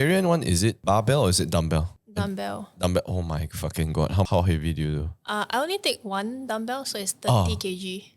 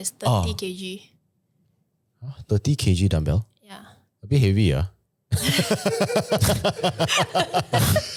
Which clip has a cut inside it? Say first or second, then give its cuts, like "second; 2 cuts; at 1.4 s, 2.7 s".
first; 3 cuts; at 0.8 s, 2.0 s, 4.3 s